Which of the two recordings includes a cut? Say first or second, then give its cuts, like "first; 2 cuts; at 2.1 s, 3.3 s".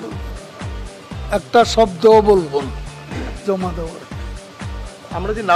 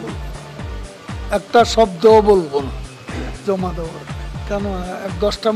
second; 1 cut; at 4.4 s